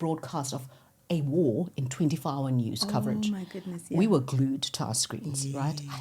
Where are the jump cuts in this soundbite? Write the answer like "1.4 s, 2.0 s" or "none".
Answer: none